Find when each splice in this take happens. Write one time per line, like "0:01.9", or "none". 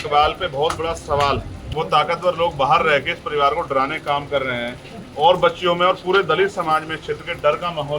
0:01.6